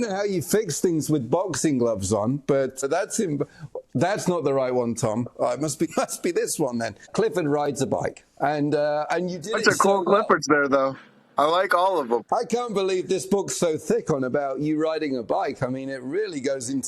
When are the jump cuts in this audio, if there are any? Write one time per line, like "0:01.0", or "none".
0:02.8
0:05.9
0:07.1
0:12.2